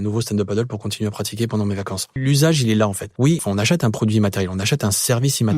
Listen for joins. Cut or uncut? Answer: cut